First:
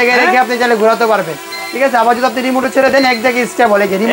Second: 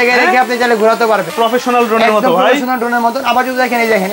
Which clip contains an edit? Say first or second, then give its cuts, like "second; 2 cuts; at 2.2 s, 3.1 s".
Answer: second; 1 cut; at 1.3 s